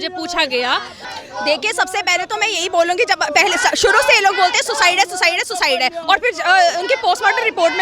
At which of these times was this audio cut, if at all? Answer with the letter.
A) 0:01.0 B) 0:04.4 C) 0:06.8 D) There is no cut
A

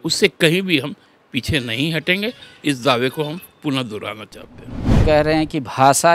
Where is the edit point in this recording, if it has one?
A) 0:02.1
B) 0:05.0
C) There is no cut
B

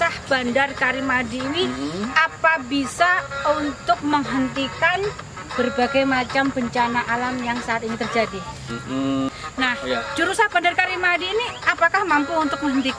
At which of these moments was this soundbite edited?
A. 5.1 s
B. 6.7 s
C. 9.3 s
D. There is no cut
C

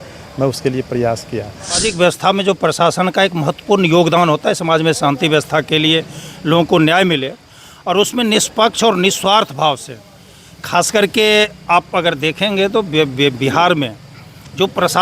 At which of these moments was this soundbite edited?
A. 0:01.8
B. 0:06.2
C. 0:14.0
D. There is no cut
A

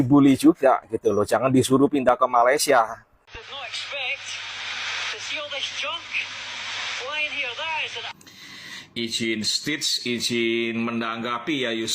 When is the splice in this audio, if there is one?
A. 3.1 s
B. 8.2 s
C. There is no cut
A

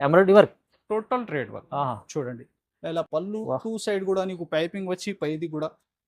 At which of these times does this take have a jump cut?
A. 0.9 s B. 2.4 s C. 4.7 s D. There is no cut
D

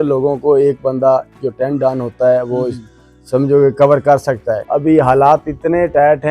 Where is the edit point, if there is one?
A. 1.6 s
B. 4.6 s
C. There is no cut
B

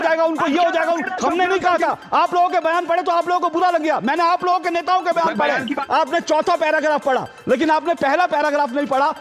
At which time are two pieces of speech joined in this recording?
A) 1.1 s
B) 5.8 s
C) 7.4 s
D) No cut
B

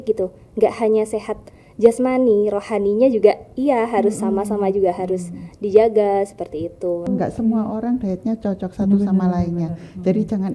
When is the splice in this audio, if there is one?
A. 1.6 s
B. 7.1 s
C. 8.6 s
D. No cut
B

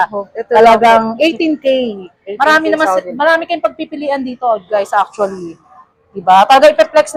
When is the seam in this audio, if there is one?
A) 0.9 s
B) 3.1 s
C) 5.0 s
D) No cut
D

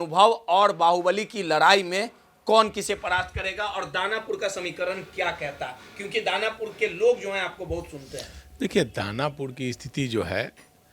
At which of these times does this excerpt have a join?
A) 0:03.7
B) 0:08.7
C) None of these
C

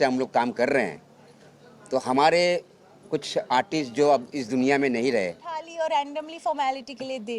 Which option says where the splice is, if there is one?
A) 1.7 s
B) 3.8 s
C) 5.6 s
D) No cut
C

